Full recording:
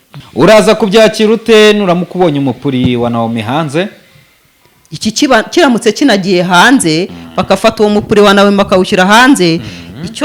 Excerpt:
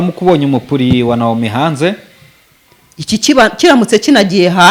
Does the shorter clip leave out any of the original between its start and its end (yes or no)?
no